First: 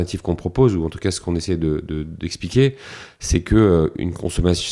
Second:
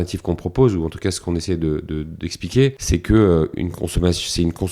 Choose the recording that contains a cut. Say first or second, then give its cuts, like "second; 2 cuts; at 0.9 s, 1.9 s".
second; 1 cut; at 2.8 s